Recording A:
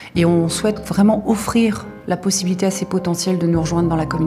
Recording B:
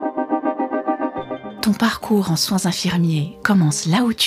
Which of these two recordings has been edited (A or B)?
B